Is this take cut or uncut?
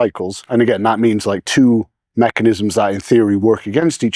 uncut